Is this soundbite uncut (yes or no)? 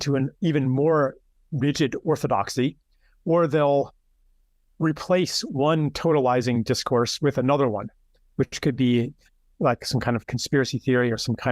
yes